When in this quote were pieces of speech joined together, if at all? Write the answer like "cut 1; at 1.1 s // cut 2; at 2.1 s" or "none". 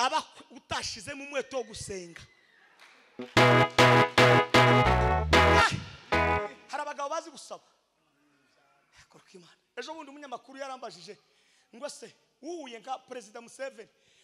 cut 1; at 5.9 s